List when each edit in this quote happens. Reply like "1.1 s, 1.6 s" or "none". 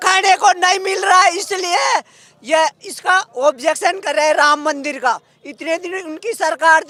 none